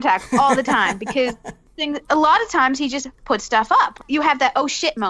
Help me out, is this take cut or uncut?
cut